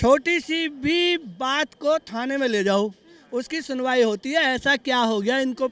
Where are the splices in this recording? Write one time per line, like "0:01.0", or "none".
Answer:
none

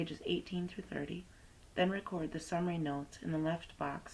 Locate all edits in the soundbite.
none

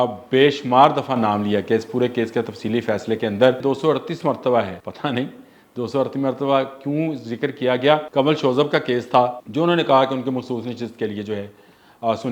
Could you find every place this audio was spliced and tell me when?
0:03.6
0:04.8
0:08.1
0:09.4

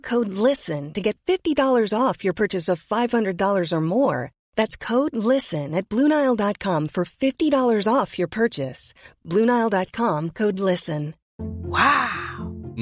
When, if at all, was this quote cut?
0:11.2

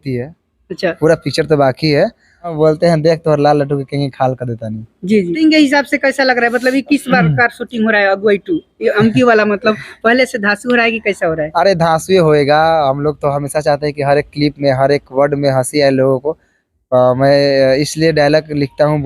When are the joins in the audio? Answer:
0:02.5
0:05.4

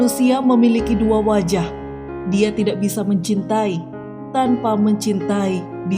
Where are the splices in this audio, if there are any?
none

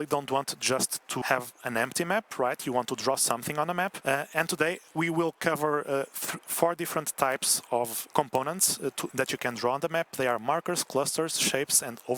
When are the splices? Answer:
0:01.2
0:04.0
0:08.0

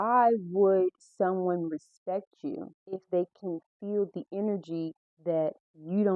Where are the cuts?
none

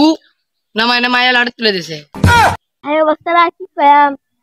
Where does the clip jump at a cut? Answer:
0:02.7

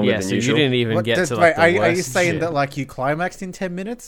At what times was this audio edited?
0:01.2

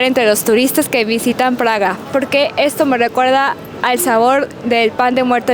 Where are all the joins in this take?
0:02.0

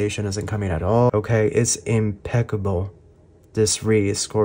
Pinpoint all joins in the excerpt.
0:01.1

